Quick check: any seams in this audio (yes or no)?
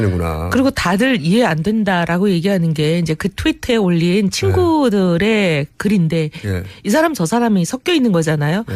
no